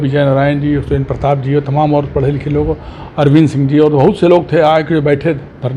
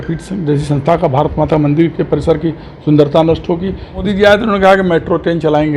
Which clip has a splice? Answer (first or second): second